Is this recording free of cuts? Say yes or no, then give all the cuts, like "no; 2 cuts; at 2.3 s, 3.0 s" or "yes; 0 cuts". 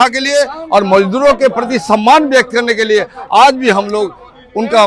yes; 0 cuts